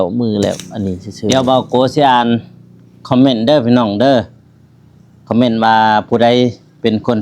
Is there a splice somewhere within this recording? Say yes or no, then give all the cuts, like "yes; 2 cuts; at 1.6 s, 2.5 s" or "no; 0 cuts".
yes; 1 cut; at 1.3 s